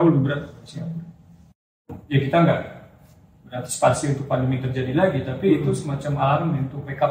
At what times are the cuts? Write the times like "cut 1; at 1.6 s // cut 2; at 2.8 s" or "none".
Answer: cut 1; at 1.6 s